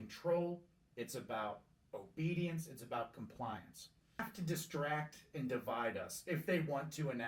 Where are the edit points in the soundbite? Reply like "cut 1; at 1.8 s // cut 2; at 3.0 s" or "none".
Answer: cut 1; at 4.3 s

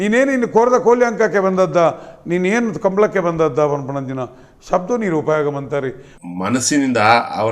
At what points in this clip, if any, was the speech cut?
cut 1; at 6.1 s

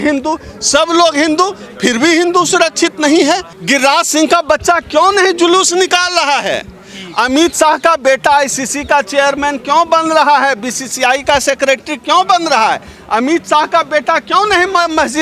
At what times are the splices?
cut 1; at 3.5 s

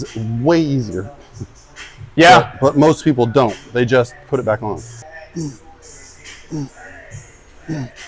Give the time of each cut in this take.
none

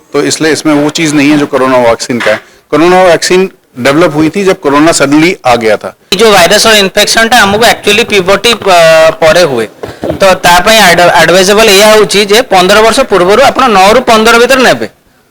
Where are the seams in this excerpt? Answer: cut 1; at 6.1 s

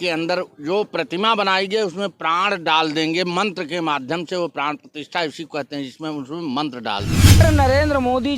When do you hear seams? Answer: cut 1; at 7.4 s

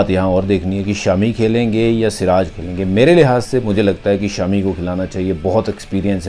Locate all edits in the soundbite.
none

